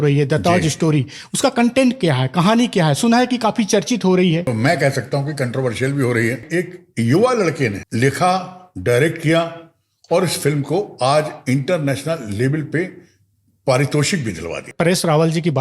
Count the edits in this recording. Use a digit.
4